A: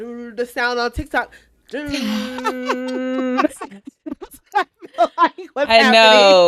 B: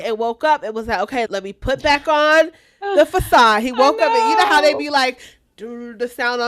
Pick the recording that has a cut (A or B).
B